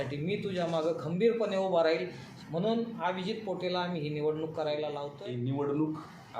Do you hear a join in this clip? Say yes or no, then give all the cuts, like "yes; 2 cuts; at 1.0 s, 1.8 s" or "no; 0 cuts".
yes; 2 cuts; at 2.3 s, 5.1 s